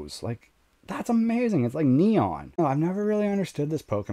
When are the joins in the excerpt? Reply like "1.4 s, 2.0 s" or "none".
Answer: 2.6 s